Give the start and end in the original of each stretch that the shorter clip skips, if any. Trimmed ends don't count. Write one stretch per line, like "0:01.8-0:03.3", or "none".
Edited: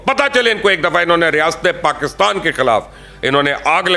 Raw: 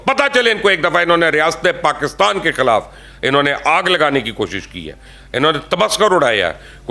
none